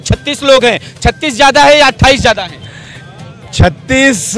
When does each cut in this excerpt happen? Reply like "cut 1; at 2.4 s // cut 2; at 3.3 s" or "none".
none